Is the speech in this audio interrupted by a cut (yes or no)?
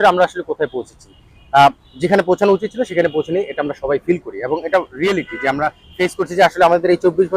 no